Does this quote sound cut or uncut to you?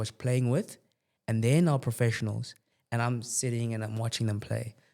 uncut